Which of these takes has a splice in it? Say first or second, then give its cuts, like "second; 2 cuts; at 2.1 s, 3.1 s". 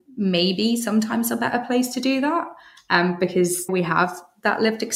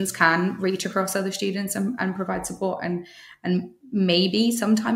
first; 1 cut; at 3.7 s